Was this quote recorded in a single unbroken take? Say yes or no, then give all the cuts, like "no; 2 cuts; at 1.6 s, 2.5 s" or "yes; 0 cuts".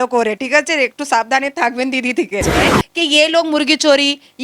no; 1 cut; at 2.8 s